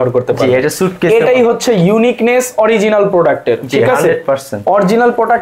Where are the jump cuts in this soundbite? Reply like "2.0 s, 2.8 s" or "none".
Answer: none